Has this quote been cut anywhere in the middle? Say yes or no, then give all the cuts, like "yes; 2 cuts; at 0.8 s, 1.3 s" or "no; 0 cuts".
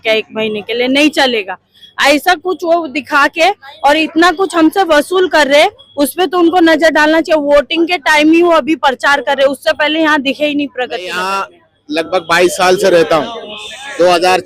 yes; 1 cut; at 11.2 s